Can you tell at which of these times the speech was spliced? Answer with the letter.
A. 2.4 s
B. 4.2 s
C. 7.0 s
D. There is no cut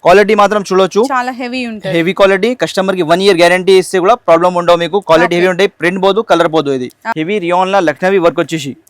C